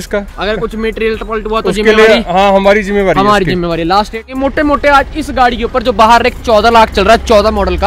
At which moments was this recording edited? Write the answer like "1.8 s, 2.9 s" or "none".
4.3 s